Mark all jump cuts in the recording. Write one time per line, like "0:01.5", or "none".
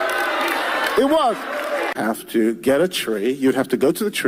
0:02.0